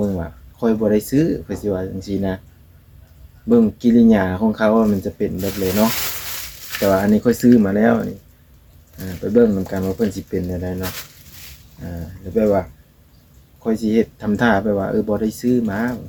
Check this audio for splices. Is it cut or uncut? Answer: uncut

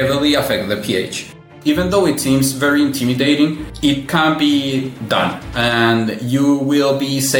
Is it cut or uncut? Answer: cut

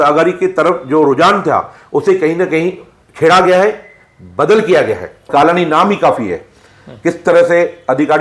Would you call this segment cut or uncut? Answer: cut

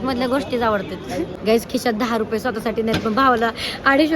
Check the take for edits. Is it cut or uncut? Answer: cut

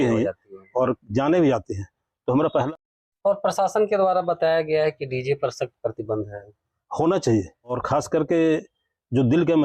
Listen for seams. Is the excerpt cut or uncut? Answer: cut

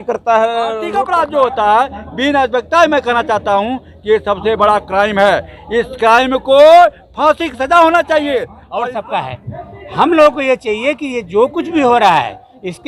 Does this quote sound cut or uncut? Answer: cut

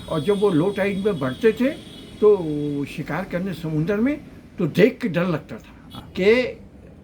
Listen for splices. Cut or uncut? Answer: cut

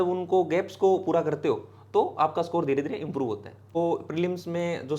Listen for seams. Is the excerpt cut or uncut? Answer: cut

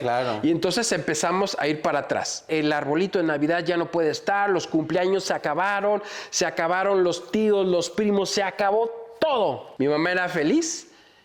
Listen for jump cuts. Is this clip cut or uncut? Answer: cut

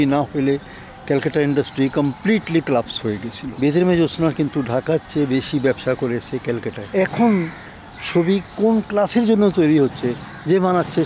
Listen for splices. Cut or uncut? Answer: cut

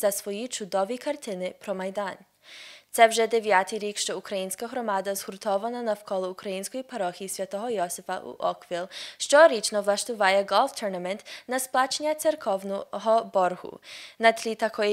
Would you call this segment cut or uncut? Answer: cut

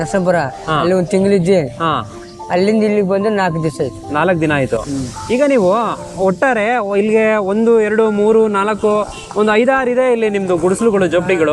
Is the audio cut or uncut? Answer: uncut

